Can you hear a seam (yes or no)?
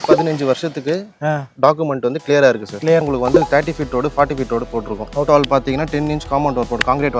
yes